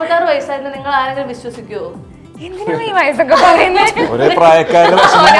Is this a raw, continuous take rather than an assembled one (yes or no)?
yes